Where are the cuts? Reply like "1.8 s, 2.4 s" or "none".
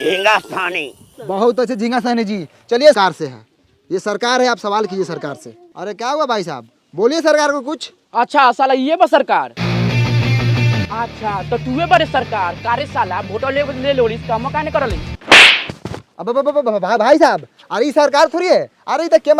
3.0 s